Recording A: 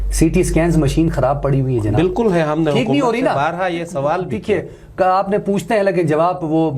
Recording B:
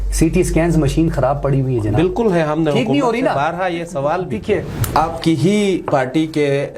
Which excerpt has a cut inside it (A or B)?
B